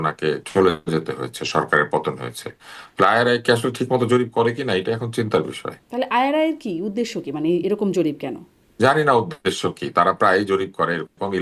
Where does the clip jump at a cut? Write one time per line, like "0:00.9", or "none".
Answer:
none